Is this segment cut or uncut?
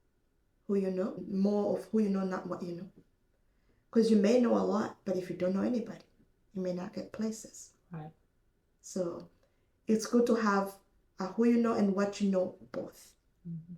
cut